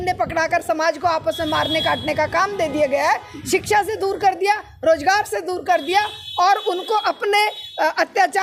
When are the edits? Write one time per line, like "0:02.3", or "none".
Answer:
none